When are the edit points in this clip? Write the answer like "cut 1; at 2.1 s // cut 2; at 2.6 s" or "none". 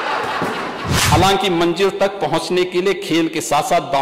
cut 1; at 1.1 s

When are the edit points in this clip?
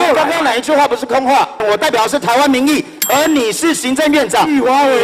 cut 1; at 1.6 s

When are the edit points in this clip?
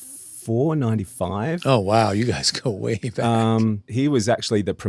cut 1; at 3.9 s

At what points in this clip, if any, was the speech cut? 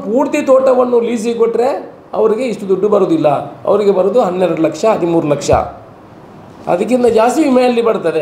none

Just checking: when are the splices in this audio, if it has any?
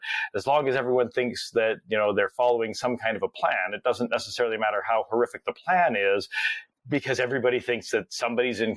none

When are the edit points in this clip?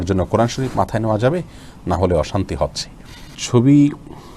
cut 1; at 3.4 s

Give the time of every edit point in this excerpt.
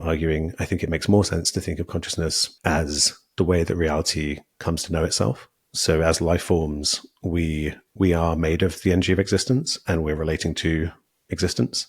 cut 1; at 2.5 s

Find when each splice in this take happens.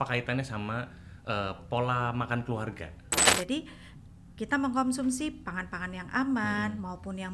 cut 1; at 3.3 s

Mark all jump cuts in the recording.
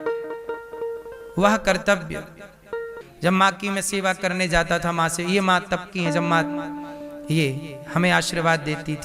cut 1; at 2.9 s

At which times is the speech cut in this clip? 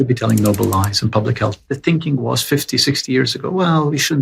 cut 1; at 1.6 s

